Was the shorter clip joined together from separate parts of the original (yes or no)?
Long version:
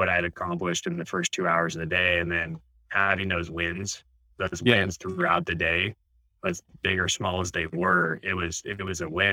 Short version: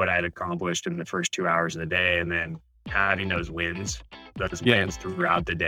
no